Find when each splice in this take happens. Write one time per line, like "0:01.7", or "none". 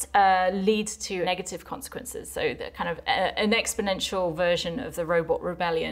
0:01.3